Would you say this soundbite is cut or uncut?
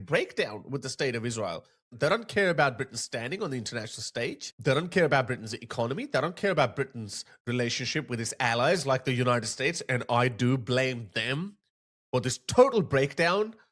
cut